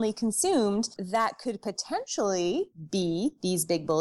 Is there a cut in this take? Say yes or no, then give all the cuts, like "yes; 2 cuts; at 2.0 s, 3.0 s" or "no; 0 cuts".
yes; 1 cut; at 1.0 s